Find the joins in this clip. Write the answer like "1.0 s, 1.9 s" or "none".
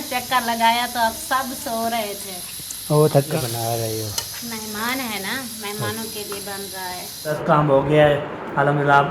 3.3 s, 7.4 s